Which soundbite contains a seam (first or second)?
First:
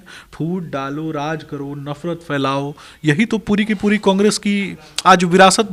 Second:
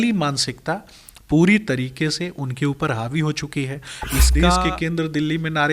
second